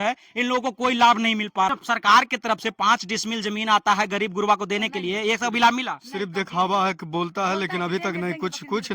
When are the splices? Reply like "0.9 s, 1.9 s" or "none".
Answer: 1.7 s

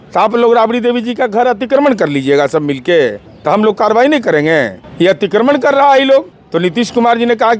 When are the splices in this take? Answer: 3.3 s, 4.8 s, 6.4 s

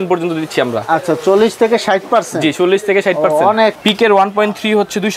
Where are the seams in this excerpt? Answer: 3.8 s

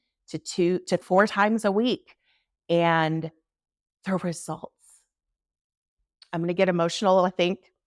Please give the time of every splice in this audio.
1.0 s

